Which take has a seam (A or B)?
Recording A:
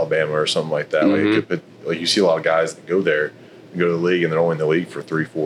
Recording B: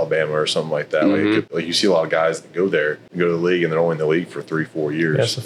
B